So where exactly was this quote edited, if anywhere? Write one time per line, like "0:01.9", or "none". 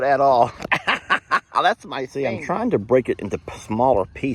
0:02.1